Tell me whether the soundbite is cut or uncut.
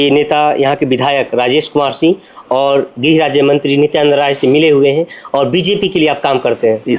uncut